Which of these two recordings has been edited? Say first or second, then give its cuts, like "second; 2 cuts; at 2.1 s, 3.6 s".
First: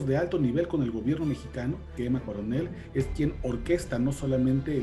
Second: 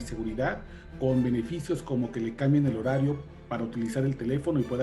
first; 1 cut; at 1.9 s